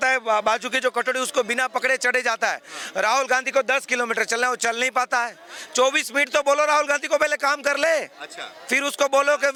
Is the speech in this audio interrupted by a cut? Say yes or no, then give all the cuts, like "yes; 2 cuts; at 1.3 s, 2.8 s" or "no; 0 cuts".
no; 0 cuts